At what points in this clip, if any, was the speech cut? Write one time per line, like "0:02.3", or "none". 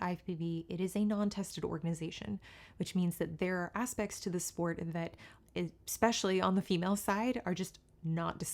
none